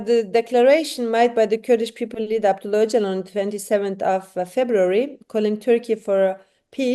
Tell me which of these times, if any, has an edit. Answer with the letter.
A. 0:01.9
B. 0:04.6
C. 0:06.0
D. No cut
D